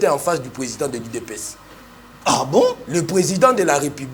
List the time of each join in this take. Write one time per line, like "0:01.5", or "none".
none